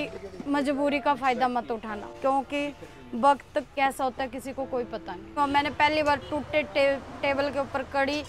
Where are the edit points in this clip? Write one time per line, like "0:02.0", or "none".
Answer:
0:02.1
0:03.7
0:05.3